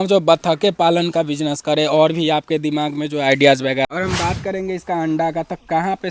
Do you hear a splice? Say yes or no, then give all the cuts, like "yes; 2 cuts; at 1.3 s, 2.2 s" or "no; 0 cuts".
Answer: yes; 1 cut; at 3.9 s